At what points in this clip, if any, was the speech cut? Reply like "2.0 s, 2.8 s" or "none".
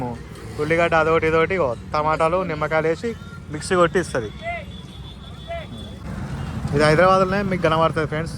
6.0 s